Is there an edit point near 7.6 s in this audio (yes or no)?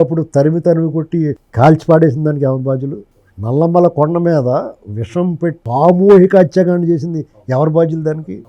no